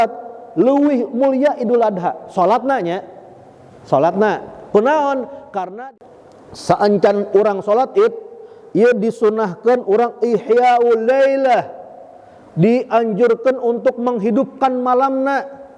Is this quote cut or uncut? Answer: cut